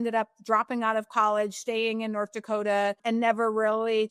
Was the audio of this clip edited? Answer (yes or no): no